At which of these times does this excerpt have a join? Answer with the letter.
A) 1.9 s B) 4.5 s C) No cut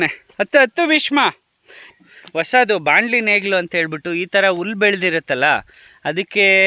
A